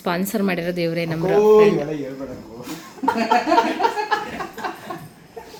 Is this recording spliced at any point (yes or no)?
no